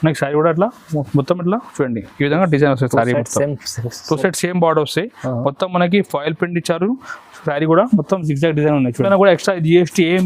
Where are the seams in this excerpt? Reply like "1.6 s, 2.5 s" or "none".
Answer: 9.1 s